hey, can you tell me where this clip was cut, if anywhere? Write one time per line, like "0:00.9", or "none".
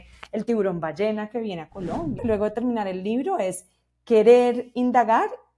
0:02.2